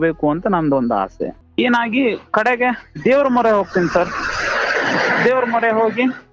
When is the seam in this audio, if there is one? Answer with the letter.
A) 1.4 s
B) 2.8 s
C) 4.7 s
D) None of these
A